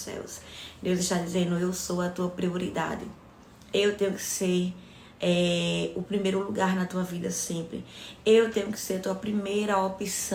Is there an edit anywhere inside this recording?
no; 0 cuts

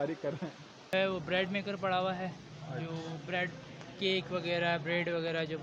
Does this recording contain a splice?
yes; 1 cut; at 0.9 s

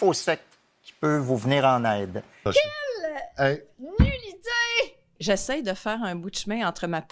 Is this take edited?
yes; 1 cut; at 5.1 s

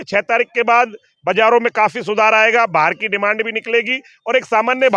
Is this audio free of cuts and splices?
yes; 0 cuts

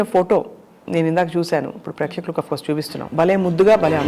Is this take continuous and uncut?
no; 1 cut; at 3.0 s

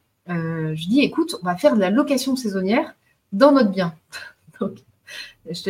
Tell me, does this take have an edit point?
no; 0 cuts

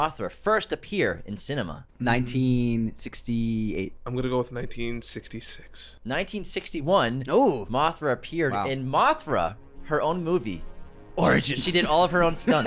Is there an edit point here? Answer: yes; 2 cuts; at 1.8 s, 4.0 s

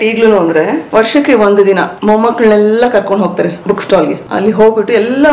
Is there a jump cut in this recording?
yes; 3 cuts; at 0.8 s, 1.9 s, 4.1 s

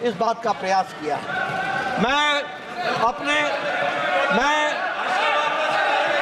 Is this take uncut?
yes; 0 cuts

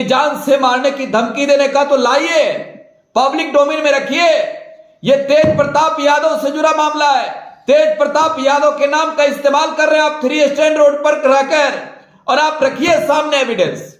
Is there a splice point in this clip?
no; 0 cuts

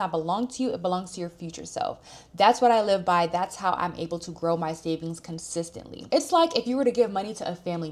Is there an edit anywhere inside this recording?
no; 0 cuts

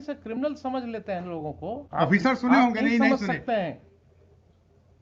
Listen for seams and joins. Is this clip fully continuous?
no; 1 cut; at 1.8 s

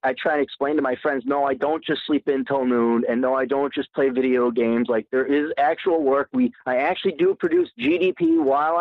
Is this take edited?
yes; 1 cut; at 5.4 s

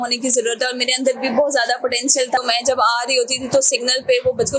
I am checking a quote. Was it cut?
yes; 1 cut; at 2.4 s

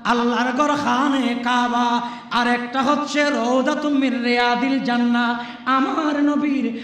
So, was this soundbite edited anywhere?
no; 0 cuts

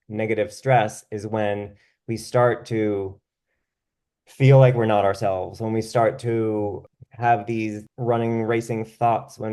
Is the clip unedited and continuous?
no; 2 cuts; at 6.8 s, 7.8 s

